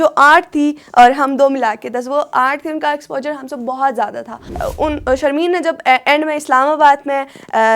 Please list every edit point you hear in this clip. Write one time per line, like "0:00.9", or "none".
0:04.4